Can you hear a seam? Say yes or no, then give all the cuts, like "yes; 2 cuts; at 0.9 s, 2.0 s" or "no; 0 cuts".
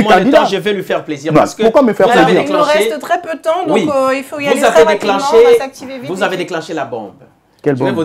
no; 0 cuts